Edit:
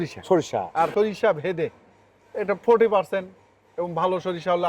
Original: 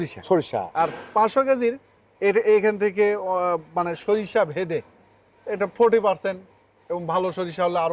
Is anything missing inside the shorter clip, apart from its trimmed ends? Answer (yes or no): yes